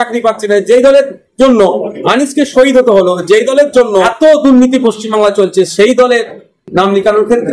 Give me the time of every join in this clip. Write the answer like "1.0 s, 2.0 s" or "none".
4.1 s